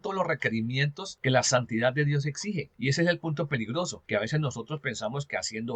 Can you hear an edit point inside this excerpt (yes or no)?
yes